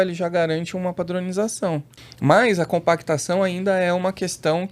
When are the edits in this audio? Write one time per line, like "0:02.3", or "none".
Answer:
0:02.0